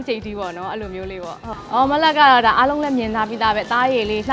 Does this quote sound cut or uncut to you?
cut